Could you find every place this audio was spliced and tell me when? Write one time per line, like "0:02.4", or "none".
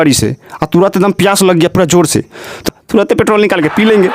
none